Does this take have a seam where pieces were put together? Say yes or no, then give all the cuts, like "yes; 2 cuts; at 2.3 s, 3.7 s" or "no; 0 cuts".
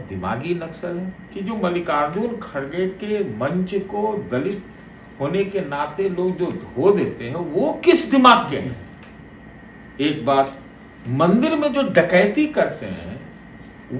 yes; 1 cut; at 1.2 s